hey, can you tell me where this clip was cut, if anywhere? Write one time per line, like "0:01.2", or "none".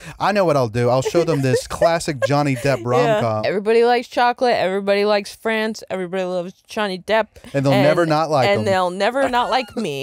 0:03.4